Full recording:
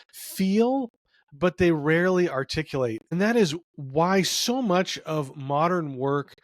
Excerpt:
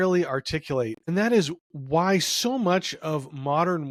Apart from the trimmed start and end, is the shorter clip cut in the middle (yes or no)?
no